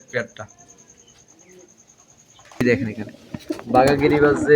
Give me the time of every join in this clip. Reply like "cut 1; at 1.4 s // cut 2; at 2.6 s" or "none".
cut 1; at 2.6 s